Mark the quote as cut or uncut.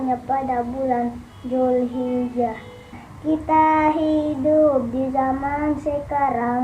cut